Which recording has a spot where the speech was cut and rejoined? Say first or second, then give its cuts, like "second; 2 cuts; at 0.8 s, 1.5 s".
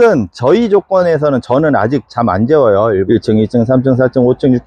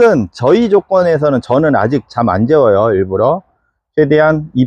first; 1 cut; at 3.0 s